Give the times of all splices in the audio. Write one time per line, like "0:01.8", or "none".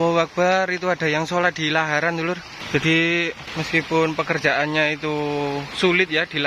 0:02.5
0:03.4